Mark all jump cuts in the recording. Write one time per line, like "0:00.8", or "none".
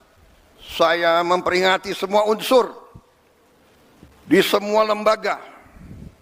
none